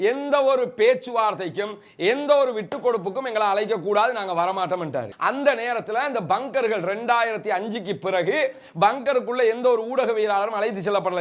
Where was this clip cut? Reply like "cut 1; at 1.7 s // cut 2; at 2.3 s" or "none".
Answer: cut 1; at 5.1 s